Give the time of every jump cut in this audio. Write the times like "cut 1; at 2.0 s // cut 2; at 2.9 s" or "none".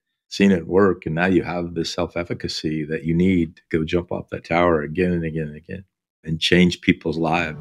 none